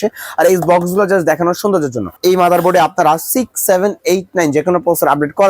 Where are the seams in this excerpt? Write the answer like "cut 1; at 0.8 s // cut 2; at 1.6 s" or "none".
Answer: cut 1; at 2.2 s